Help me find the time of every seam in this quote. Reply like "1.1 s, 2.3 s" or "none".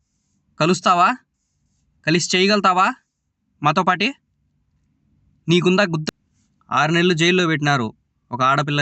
6.0 s